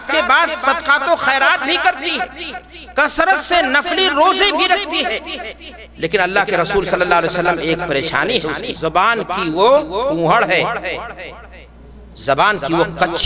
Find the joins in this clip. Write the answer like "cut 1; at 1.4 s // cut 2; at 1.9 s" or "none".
cut 1; at 8.7 s

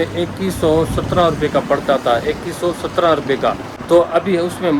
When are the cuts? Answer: cut 1; at 3.7 s

